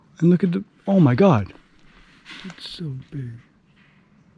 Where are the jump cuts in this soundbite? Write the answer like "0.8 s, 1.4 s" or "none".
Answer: none